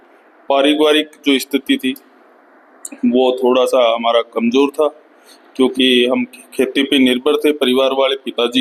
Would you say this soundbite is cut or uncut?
uncut